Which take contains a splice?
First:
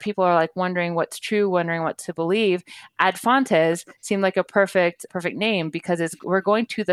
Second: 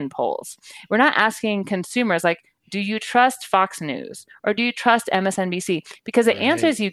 first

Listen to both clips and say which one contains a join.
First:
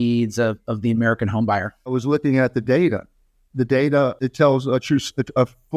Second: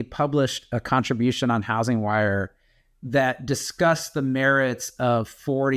first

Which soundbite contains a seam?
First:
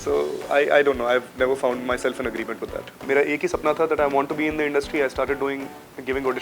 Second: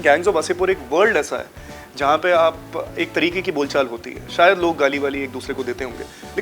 first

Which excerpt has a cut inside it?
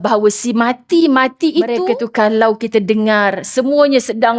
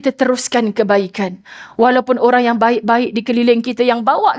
first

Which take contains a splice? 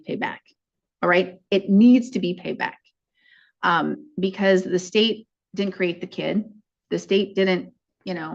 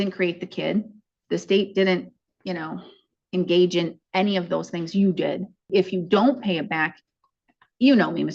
second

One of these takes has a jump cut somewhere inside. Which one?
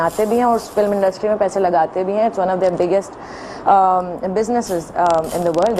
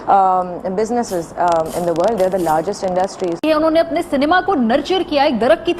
second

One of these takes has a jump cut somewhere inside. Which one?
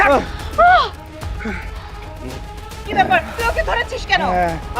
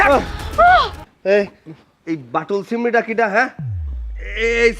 second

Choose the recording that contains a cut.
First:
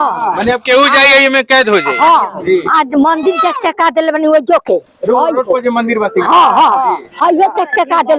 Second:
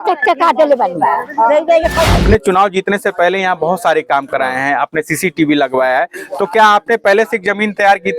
second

